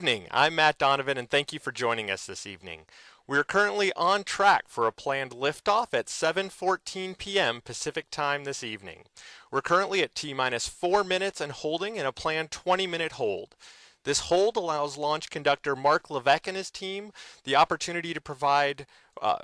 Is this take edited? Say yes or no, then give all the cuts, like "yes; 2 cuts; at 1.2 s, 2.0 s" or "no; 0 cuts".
no; 0 cuts